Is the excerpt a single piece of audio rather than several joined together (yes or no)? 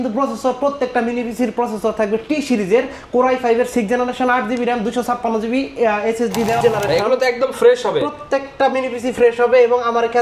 no